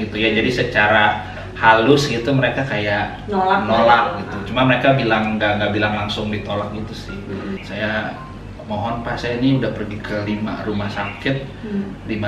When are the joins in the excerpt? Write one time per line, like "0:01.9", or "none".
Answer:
0:07.6